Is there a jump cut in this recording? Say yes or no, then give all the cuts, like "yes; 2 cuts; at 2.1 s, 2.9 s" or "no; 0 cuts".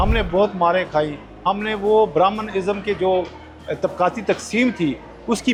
no; 0 cuts